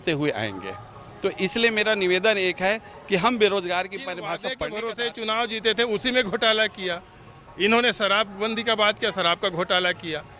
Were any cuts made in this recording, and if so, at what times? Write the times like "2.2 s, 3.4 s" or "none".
4.4 s